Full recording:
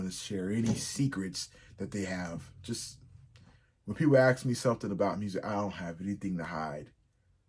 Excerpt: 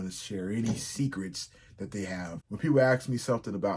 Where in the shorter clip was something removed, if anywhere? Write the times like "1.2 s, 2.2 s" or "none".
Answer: 2.4 s